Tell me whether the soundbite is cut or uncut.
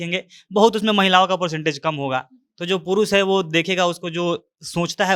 uncut